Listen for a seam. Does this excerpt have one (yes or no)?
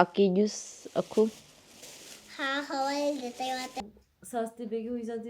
yes